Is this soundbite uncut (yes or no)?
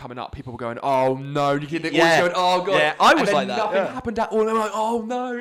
yes